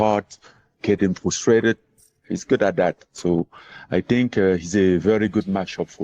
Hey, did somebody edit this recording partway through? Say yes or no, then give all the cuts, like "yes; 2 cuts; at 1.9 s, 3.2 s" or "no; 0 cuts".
yes; 1 cut; at 4.0 s